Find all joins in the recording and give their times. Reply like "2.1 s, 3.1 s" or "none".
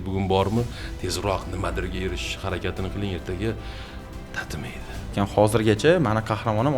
5.1 s